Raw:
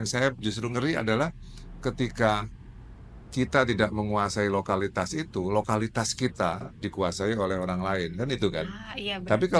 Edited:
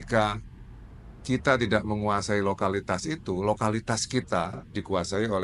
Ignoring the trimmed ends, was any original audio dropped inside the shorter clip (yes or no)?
no